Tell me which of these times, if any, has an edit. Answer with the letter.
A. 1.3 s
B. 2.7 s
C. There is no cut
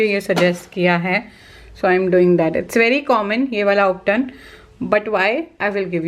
C